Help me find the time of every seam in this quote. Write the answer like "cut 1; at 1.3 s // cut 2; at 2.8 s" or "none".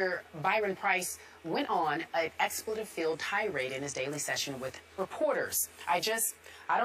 none